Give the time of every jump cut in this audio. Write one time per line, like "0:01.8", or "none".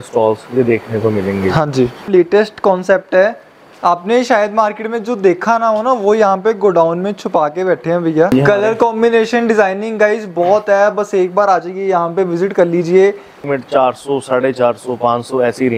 0:02.0
0:08.3
0:13.4